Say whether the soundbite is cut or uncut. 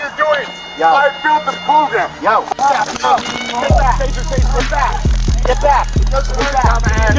uncut